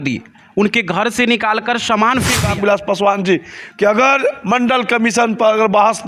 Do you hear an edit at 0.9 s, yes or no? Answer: no